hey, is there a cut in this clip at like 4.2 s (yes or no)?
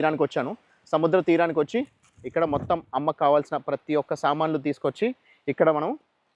no